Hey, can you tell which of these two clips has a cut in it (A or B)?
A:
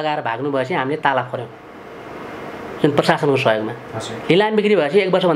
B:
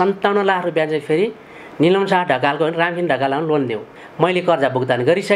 B